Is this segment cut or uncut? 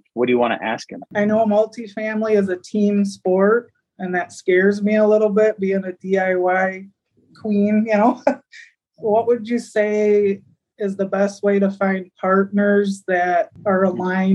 cut